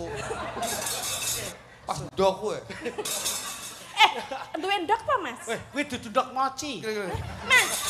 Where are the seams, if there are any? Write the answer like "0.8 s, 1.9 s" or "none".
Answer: 1.5 s